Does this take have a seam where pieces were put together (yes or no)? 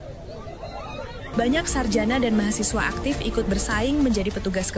yes